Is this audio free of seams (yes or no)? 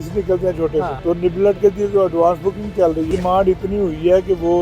no